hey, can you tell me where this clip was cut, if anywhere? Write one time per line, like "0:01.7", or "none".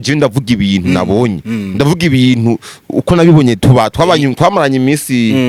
none